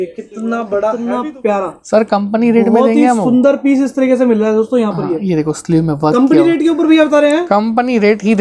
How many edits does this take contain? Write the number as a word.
one